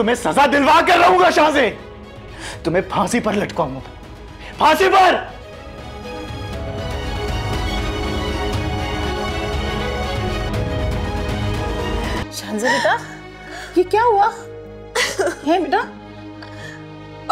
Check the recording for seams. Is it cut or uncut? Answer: cut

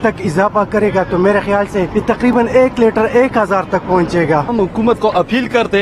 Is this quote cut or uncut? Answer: cut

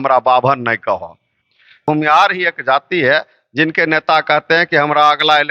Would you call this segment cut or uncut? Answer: cut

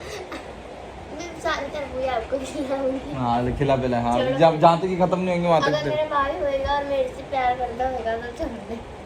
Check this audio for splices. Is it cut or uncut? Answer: cut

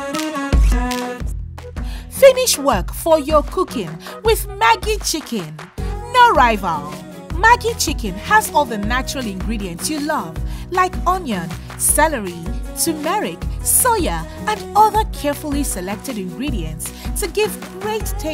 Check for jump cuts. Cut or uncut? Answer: cut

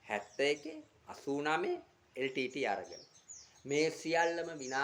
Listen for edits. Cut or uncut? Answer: uncut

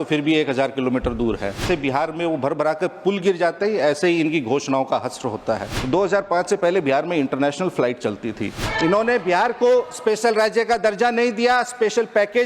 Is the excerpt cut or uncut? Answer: cut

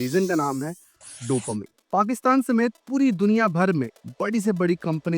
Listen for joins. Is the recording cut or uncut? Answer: cut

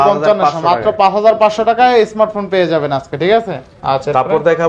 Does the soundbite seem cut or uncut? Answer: uncut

